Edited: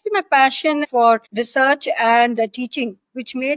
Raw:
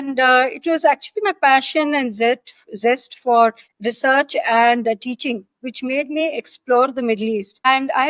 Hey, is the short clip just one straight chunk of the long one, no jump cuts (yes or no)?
no